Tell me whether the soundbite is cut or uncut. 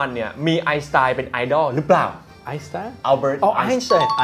uncut